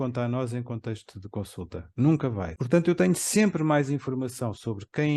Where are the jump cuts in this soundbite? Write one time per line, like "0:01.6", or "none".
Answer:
0:02.5